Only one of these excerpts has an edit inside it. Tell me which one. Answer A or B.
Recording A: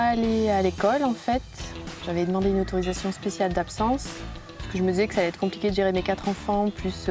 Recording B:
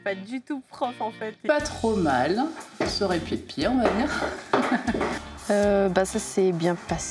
B